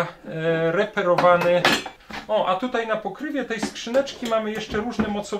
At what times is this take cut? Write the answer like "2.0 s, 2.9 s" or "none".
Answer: 1.9 s